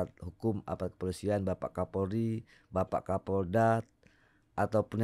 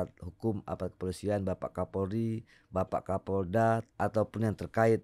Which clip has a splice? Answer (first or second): second